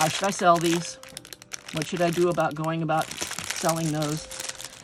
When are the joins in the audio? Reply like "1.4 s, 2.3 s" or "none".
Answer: none

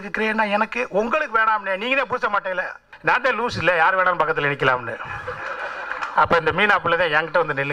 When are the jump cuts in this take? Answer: 2.9 s

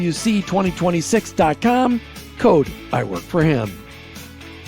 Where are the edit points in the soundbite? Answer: 3.8 s

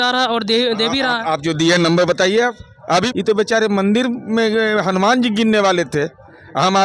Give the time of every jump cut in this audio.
3.1 s

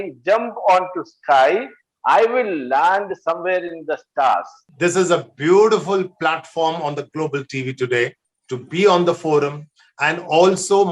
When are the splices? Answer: 4.7 s

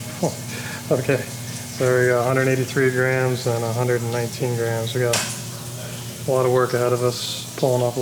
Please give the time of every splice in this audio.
none

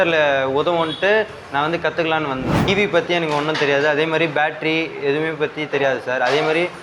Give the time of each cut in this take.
2.6 s

